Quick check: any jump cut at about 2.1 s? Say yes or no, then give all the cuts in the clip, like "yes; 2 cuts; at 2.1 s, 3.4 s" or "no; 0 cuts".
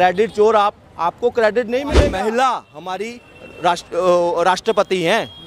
yes; 1 cut; at 2.1 s